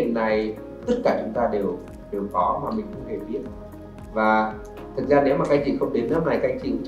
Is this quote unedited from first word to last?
no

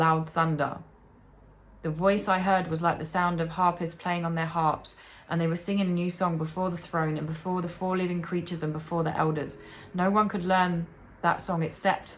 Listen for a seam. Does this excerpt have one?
no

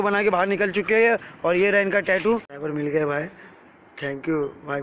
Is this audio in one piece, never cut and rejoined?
no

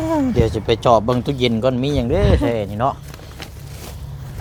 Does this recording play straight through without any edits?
yes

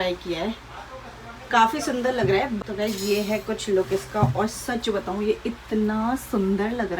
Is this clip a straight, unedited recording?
no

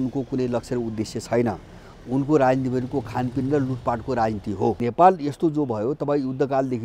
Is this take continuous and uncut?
no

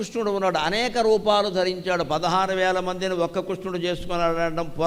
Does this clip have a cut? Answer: no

